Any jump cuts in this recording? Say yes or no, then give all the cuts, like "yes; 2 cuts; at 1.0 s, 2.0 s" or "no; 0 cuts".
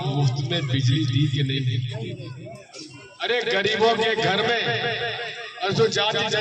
no; 0 cuts